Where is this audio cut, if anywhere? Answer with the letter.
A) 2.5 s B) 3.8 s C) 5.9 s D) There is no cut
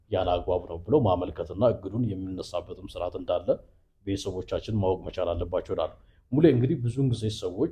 D